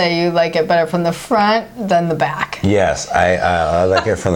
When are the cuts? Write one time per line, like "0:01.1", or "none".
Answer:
none